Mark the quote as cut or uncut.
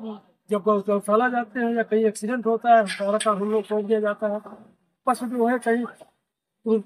uncut